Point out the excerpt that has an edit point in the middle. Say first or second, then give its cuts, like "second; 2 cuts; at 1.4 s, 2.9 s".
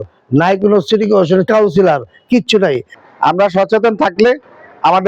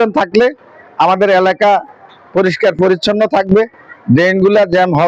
first; 1 cut; at 2.9 s